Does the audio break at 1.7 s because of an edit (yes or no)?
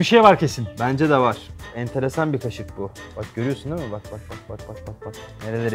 no